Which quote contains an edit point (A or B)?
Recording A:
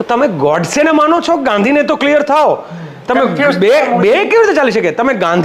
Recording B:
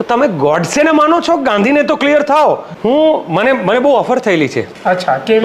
B